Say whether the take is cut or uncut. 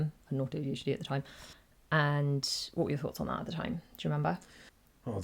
uncut